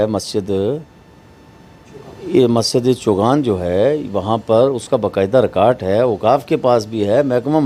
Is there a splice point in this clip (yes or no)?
no